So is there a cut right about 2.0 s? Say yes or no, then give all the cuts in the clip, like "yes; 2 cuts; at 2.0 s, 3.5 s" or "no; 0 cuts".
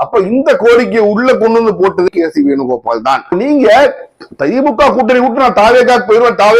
no; 1 cut; at 3.3 s